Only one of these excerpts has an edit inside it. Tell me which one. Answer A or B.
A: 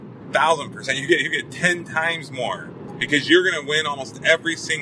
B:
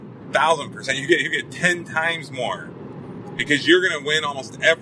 A